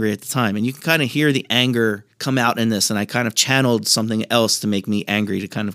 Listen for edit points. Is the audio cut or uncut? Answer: uncut